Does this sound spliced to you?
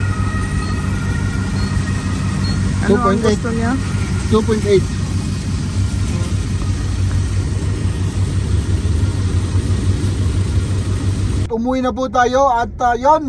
yes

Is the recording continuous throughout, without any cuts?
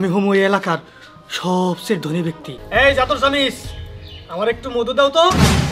no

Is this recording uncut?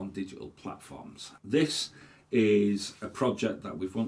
no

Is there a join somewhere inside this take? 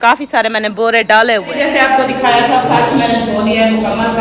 yes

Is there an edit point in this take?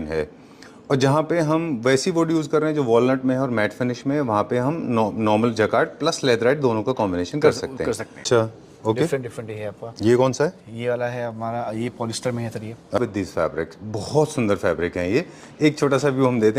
yes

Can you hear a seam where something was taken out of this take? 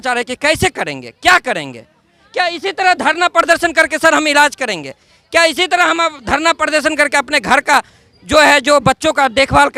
no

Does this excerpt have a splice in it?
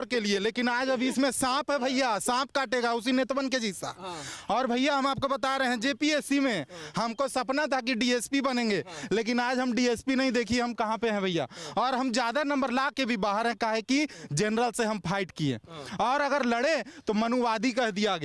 no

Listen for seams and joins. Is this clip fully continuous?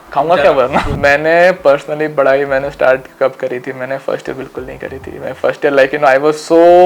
no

